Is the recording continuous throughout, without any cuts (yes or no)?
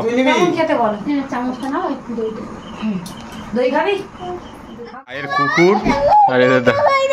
no